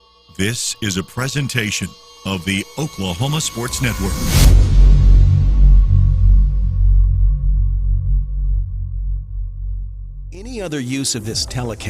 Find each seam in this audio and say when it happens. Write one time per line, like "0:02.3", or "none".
0:10.3